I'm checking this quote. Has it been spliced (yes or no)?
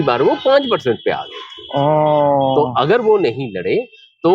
no